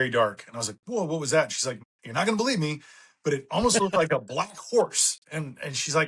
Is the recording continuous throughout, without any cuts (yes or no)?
no